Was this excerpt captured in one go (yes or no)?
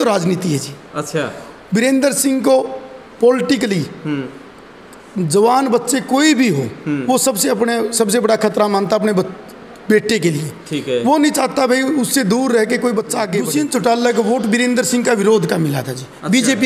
no